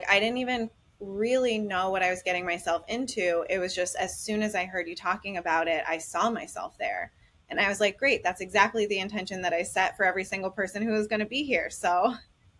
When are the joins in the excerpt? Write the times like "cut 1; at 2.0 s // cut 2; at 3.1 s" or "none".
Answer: none